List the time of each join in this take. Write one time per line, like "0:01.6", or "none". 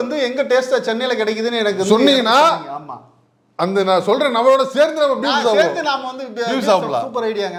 none